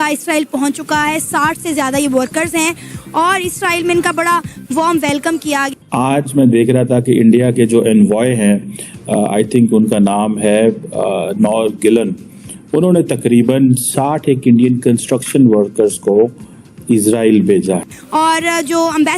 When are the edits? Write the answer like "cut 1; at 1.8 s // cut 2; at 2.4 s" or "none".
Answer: cut 1; at 5.7 s // cut 2; at 18.0 s